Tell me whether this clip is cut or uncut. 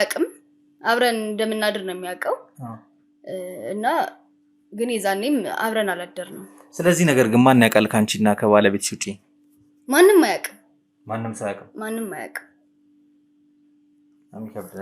uncut